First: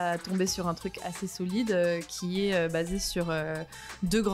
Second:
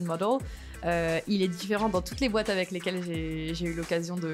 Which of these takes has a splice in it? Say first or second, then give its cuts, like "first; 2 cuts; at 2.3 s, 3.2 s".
first; 1 cut; at 1.0 s